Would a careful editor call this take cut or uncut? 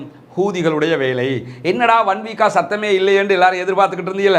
uncut